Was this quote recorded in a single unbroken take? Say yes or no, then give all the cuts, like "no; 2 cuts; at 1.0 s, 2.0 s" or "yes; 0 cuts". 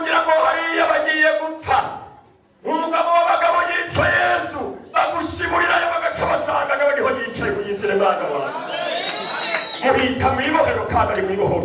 yes; 0 cuts